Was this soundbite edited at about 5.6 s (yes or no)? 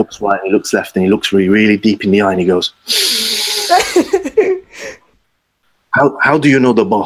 yes